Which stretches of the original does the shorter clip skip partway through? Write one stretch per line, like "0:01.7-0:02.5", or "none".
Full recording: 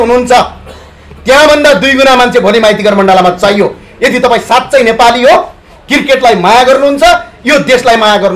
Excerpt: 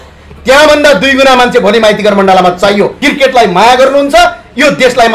0:03.8-0:05.9